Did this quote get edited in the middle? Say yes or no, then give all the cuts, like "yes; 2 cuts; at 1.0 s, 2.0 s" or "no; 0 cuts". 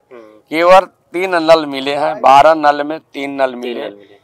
no; 0 cuts